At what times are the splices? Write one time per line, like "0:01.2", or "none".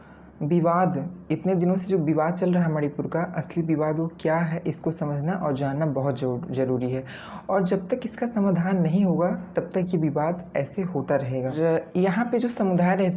0:11.8

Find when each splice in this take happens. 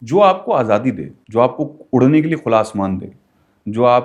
0:01.1

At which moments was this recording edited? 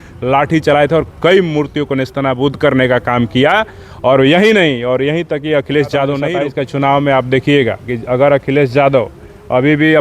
0:06.2

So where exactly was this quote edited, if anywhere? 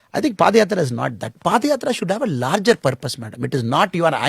0:01.4

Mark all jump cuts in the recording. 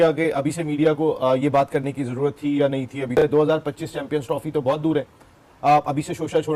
none

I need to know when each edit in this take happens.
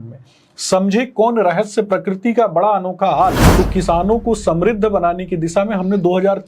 0:03.4

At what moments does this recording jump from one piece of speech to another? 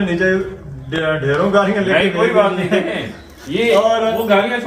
none

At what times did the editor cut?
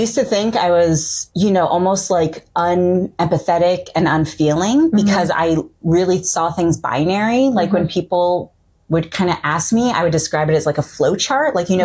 0:01.2

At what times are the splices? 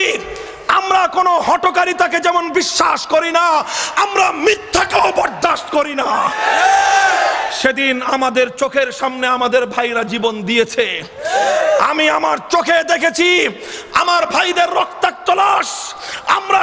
none

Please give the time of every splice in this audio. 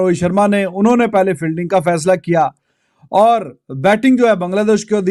none

